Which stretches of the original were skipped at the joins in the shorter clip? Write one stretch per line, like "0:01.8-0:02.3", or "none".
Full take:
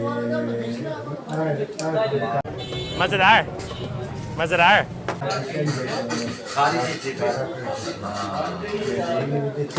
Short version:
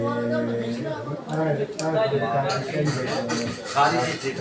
0:02.5-0:05.3